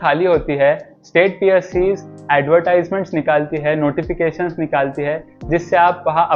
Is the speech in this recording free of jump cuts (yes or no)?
yes